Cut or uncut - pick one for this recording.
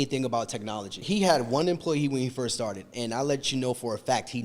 cut